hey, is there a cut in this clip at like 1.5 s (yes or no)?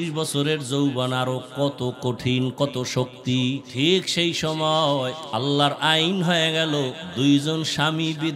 no